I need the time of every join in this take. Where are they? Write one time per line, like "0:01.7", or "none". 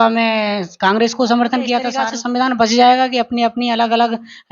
0:02.1